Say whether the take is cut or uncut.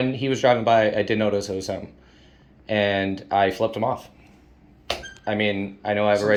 uncut